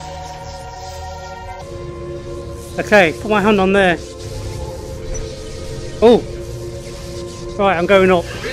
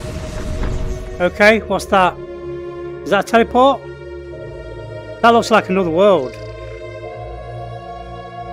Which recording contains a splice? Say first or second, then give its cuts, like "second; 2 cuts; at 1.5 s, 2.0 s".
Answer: first; 1 cut; at 1.6 s